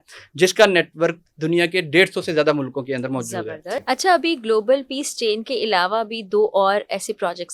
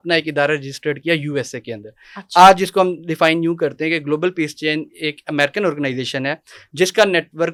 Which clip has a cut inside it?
first; 1 cut; at 3.7 s

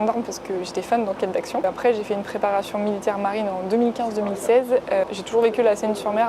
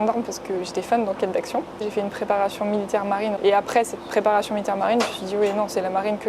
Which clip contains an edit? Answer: second; 2 cuts; at 1.8 s, 3.4 s

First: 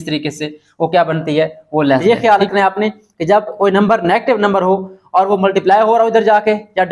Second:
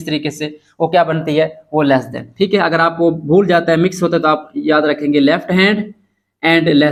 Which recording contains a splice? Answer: first; 1 cut; at 2.0 s

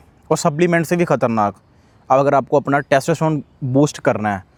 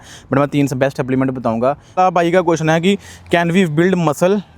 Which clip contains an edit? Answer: second; 1 cut; at 2.0 s

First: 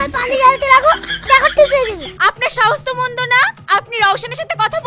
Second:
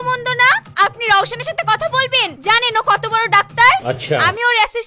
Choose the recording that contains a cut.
first; 2 cuts; at 1.1 s, 2.0 s

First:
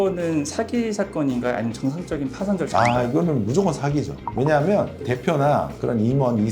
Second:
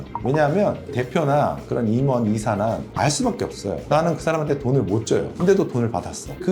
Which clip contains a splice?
second; 1 cut; at 3.8 s

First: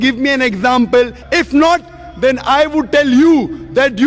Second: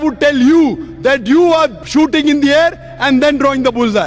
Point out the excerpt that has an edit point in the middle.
first; 1 cut; at 1.2 s

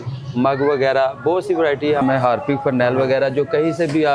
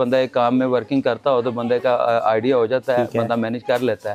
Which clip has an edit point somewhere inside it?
first; 1 cut; at 2.0 s

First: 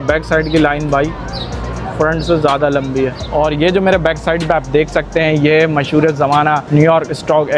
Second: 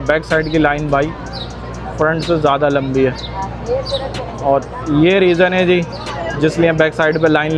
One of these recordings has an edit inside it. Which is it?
first; 2 cuts; at 3.2 s, 6.6 s

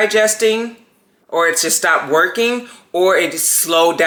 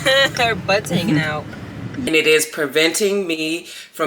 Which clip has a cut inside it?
second; 1 cut; at 2.1 s

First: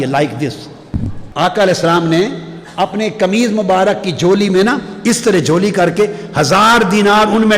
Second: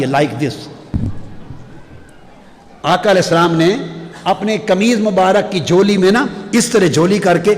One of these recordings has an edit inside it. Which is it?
first; 1 cut; at 1.2 s

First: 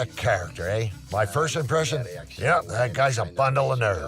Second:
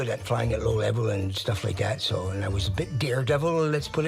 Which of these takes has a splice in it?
first; 1 cut; at 1.0 s

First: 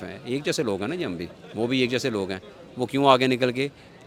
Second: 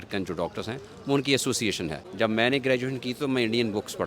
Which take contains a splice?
second; 1 cut; at 2.0 s

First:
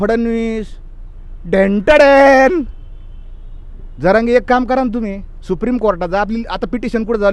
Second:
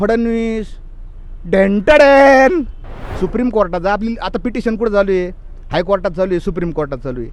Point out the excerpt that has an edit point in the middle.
second; 1 cut; at 3.0 s

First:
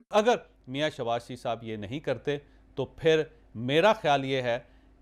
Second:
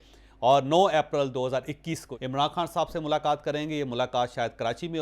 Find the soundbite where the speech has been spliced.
second; 1 cut; at 2.1 s

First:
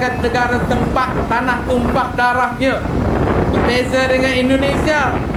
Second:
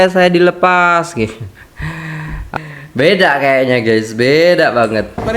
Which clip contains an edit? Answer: second; 1 cut; at 2.6 s

